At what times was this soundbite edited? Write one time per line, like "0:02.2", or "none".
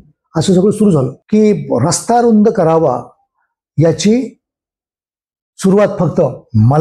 0:01.2